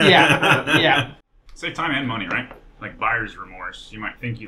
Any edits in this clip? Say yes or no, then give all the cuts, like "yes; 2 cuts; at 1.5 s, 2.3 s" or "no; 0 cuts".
yes; 1 cut; at 1.2 s